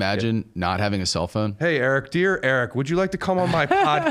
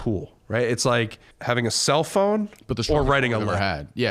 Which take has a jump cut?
second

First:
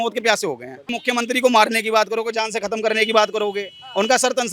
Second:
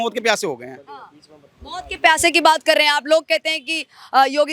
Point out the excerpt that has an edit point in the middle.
first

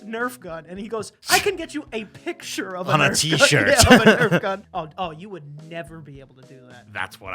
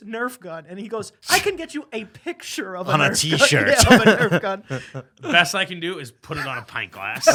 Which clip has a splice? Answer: first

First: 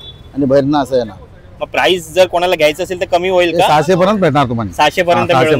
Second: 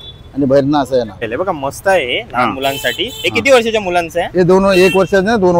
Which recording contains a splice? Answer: second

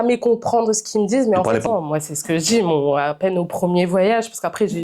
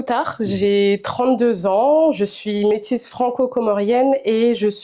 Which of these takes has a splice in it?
first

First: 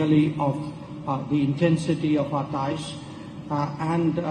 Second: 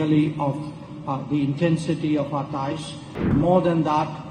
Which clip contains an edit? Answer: second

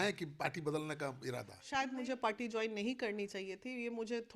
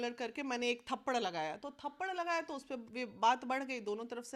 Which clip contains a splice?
first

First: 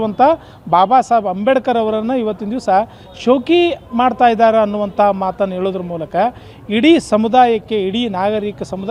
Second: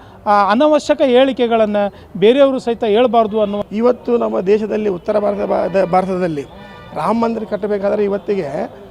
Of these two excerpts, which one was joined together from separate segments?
second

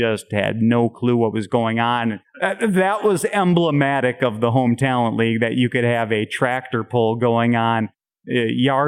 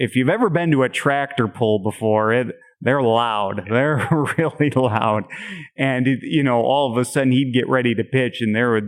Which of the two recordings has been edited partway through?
first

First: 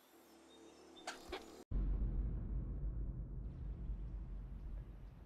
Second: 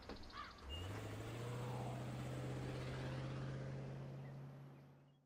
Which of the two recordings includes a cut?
first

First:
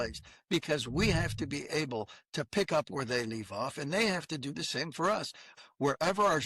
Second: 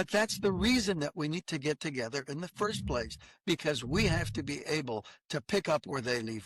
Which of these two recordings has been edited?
first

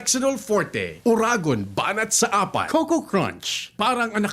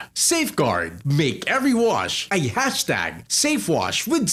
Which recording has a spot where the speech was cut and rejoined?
first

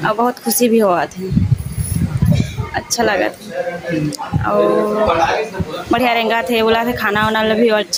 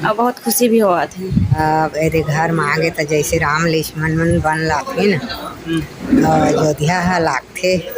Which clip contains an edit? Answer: second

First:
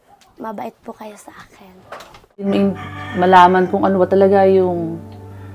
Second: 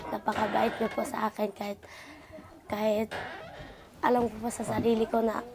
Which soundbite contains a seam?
first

